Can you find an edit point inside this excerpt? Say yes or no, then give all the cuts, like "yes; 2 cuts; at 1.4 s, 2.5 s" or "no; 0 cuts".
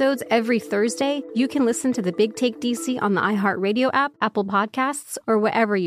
yes; 2 cuts; at 1.2 s, 4.1 s